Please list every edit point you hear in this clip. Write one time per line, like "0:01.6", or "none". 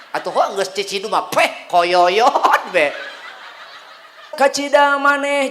0:04.3

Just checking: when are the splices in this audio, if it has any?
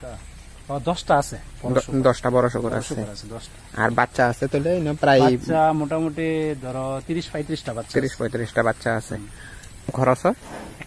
0:09.9

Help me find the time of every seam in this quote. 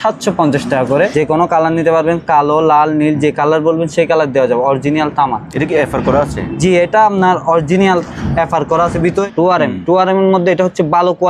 0:01.1
0:09.2

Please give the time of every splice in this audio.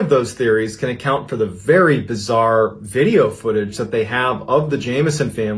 none

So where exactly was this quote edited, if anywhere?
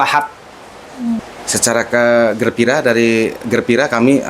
0:01.3

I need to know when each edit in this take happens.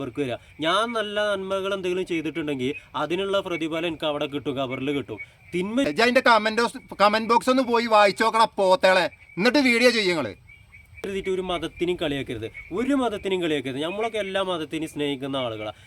0:05.9
0:10.9

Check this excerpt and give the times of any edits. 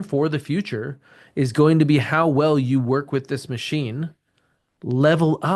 none

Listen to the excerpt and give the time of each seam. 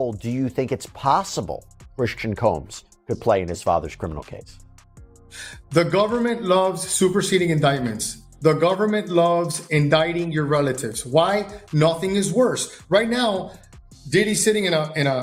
none

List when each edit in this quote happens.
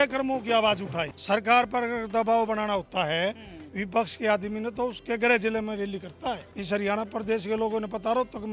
0:01.1
0:06.5

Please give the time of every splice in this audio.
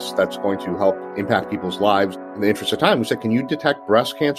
0:01.0
0:02.3

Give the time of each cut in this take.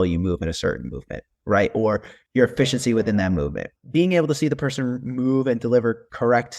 0:02.1
0:03.6

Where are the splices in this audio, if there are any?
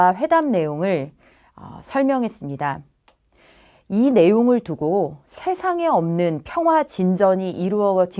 0:06.1

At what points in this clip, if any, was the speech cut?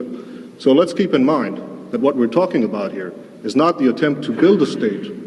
0:03.1

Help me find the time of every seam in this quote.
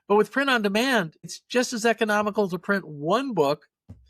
0:01.4

